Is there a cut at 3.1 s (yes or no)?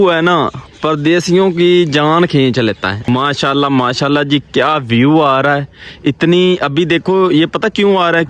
yes